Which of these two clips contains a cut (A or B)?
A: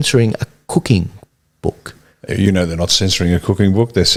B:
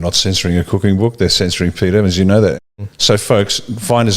B